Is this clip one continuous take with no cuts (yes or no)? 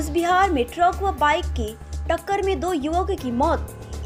yes